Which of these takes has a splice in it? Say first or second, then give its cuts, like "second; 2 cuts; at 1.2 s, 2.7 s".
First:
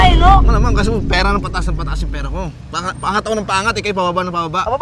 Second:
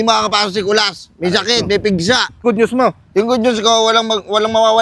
second; 1 cut; at 2.4 s